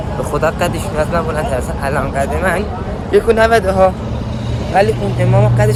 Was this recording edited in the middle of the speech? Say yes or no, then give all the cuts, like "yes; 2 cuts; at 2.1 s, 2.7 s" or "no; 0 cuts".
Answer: no; 0 cuts